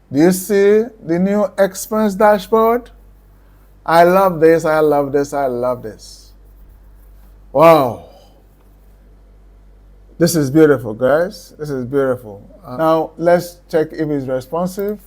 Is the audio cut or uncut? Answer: cut